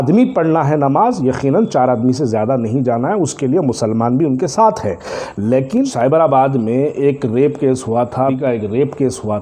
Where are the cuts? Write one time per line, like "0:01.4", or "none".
0:05.9
0:08.3